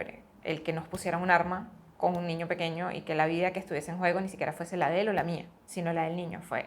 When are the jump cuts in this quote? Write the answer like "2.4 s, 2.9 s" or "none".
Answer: 5.6 s